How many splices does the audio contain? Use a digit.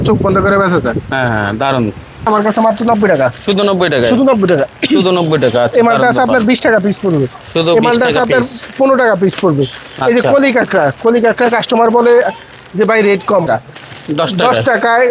2